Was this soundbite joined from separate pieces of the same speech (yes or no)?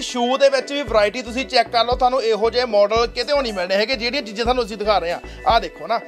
no